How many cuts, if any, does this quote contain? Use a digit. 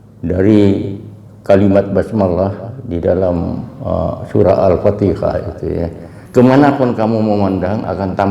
1